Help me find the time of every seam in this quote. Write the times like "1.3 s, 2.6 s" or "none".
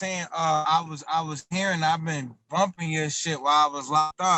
none